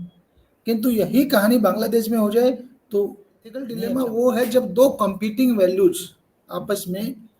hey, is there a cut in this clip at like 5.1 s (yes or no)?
yes